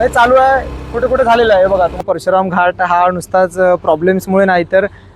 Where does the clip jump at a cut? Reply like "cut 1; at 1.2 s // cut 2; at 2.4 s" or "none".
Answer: cut 1; at 2.0 s